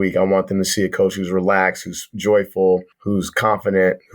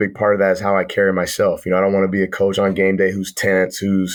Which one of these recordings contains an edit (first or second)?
first